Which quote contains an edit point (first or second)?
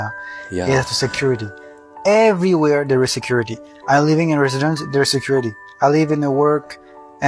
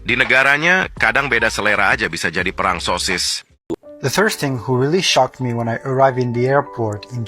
second